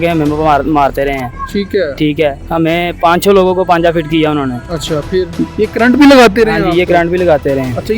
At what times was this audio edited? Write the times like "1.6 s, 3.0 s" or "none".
5.5 s